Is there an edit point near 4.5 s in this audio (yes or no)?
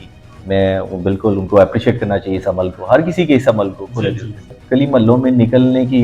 yes